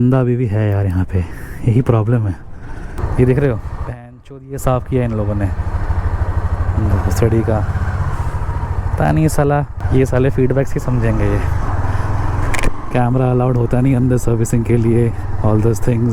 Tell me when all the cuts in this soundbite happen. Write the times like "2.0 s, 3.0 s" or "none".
3.0 s, 9.8 s